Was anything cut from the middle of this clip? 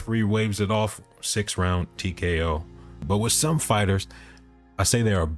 yes; 1 cut; at 3.0 s

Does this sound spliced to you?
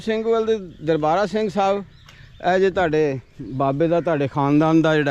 no; 0 cuts

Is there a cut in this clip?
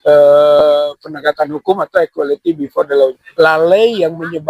yes; 1 cut; at 3.2 s

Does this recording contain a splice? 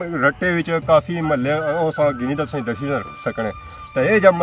no; 0 cuts

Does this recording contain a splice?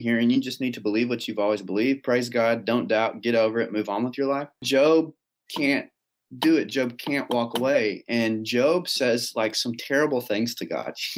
yes; 1 cut; at 4.6 s

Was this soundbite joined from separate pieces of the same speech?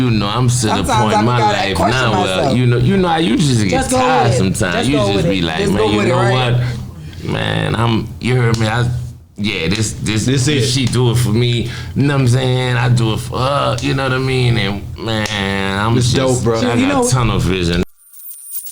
yes; 1 cut; at 17.8 s

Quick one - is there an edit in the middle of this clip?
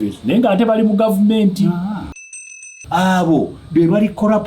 yes; 1 cut; at 2.5 s

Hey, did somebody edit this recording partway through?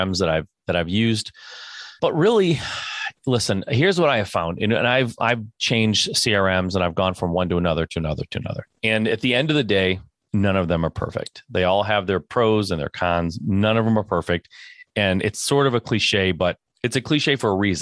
yes; 4 cuts; at 1.9 s, 8.6 s, 10.1 s, 16.7 s

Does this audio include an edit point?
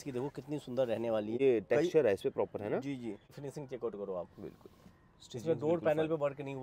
yes; 2 cuts; at 1.4 s, 3.3 s

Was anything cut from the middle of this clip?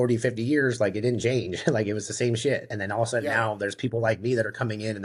no; 0 cuts

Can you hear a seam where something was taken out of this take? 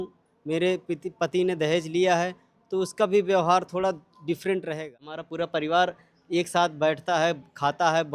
yes; 1 cut; at 5.2 s

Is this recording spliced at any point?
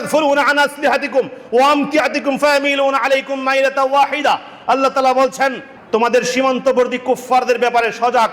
no; 0 cuts

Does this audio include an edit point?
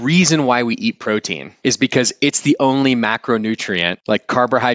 yes; 2 cuts; at 1.4 s, 3.9 s

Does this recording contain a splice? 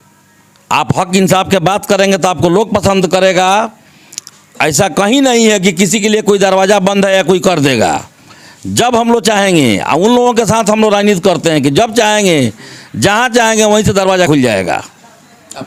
no; 0 cuts

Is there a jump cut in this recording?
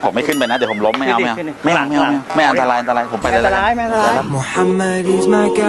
yes; 1 cut; at 4.1 s

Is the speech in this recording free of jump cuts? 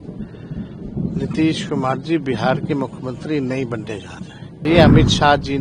no; 1 cut; at 4.7 s

